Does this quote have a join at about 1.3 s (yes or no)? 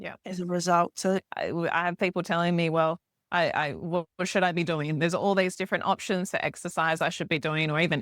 yes